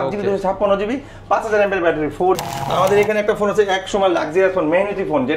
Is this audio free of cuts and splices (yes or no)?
no